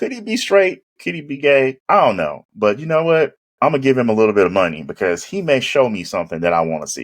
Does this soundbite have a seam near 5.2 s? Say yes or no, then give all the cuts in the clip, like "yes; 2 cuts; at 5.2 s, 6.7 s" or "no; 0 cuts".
no; 2 cuts; at 1.8 s, 3.4 s